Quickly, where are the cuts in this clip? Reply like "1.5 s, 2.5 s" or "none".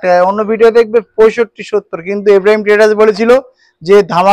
none